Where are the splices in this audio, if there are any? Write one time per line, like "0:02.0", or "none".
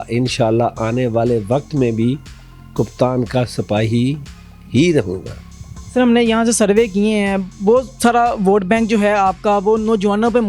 none